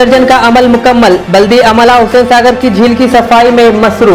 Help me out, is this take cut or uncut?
uncut